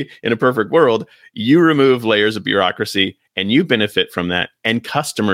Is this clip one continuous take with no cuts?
yes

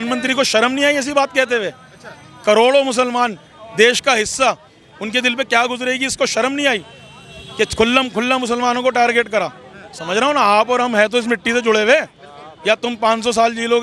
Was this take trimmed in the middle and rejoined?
no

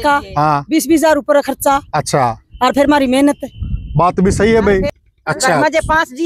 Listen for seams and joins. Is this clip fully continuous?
no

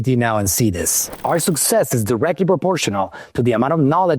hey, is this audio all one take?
no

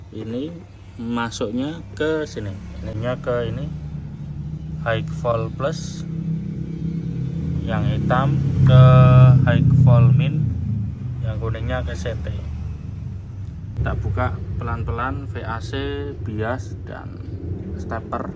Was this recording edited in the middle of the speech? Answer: yes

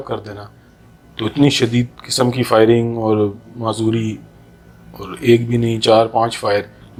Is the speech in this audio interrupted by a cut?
no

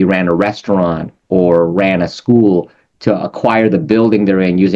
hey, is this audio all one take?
yes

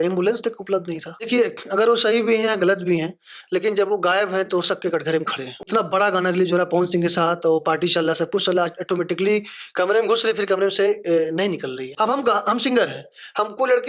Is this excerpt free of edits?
no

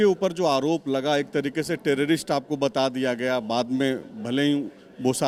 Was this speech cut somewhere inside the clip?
no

